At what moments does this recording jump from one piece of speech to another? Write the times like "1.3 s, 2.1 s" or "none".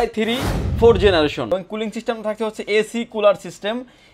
1.5 s